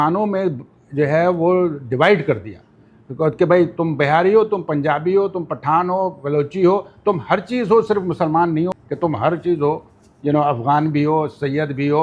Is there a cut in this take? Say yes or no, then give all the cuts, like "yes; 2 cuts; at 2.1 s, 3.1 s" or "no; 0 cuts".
yes; 1 cut; at 8.7 s